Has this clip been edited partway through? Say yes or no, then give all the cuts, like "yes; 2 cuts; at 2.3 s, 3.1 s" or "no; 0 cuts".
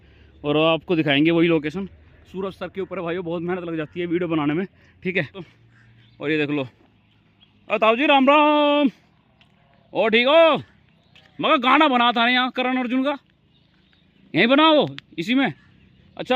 yes; 1 cut; at 5.4 s